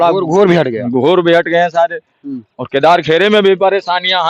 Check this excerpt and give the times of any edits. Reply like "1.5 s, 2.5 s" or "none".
none